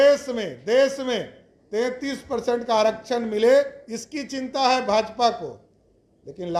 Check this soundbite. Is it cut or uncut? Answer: uncut